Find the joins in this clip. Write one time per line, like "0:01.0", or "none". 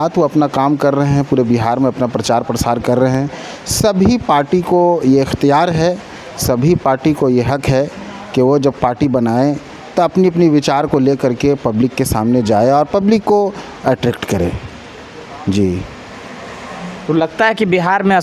none